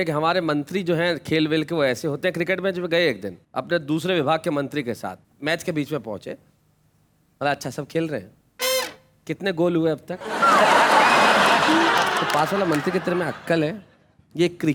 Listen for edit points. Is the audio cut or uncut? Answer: uncut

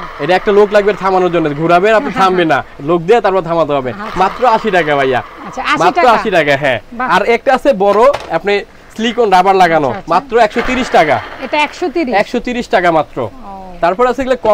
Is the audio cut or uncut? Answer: uncut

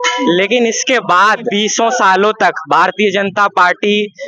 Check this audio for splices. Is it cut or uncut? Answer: cut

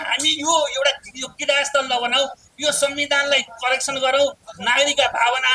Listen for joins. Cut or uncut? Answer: uncut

